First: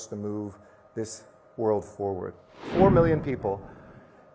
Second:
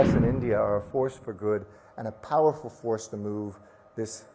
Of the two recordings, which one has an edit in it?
first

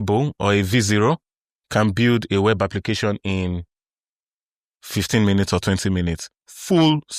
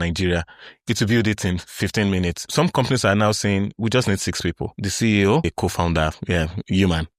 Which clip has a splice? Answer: second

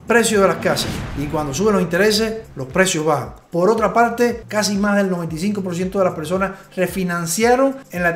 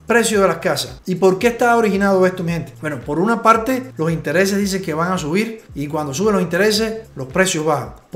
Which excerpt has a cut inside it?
first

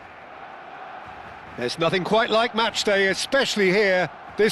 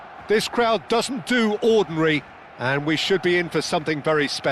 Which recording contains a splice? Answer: first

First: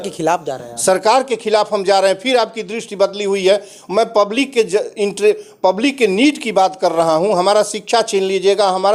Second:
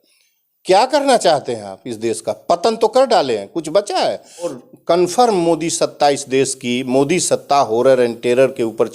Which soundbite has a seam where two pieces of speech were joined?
second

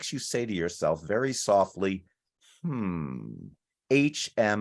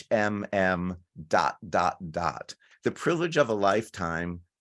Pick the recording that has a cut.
second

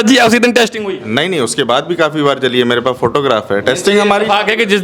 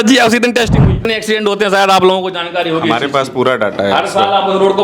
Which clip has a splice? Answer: second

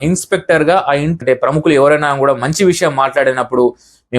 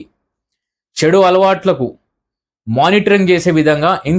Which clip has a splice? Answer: first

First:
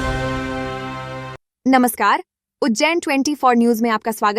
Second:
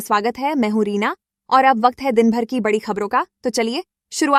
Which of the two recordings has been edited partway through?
first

